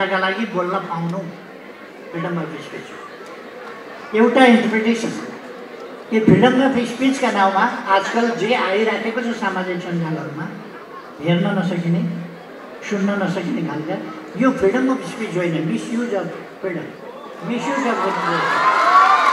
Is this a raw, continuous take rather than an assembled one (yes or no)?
yes